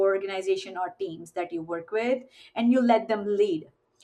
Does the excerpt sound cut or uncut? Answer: uncut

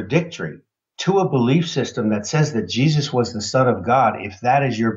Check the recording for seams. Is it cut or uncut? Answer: uncut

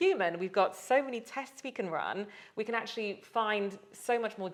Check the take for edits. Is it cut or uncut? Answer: uncut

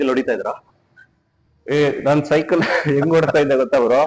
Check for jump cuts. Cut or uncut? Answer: uncut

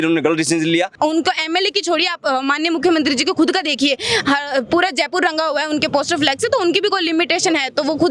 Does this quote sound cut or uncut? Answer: cut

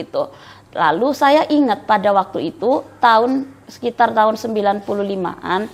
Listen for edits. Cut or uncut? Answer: uncut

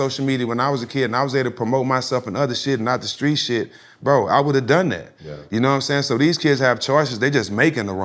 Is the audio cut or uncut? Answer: uncut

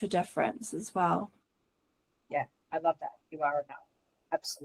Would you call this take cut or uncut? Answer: uncut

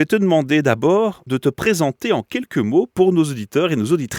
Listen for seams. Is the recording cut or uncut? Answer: cut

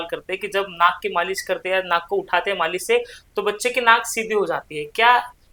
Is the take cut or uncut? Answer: uncut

